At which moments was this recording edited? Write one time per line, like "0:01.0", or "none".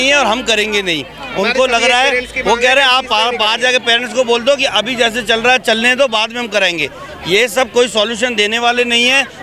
none